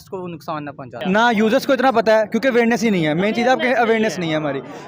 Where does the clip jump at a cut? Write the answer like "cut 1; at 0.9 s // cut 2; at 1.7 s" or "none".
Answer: cut 1; at 0.9 s